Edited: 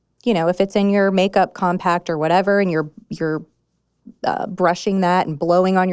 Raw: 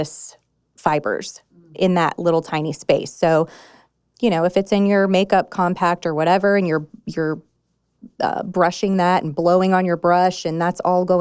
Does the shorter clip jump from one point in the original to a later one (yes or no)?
no